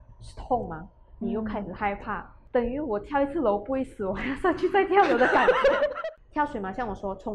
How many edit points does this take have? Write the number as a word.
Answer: one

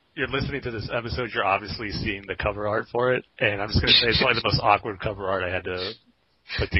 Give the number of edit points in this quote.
one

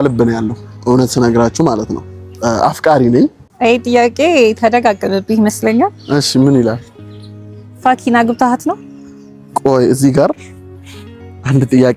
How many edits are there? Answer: one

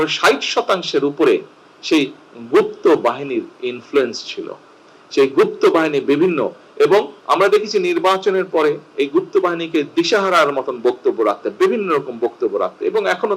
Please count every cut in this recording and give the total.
one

